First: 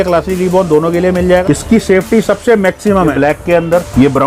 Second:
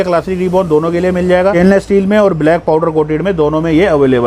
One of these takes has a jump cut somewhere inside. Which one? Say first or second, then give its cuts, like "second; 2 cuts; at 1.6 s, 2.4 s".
first; 2 cuts; at 1.4 s, 3.1 s